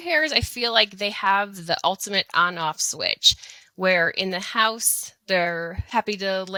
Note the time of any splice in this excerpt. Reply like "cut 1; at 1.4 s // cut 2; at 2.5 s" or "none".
none

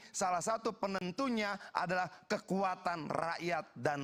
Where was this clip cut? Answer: none

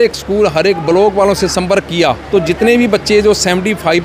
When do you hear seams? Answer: cut 1; at 2.2 s

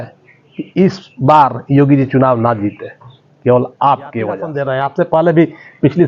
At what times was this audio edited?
cut 1; at 4.5 s

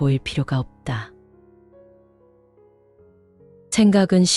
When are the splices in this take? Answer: cut 1; at 1.6 s // cut 2; at 3.3 s

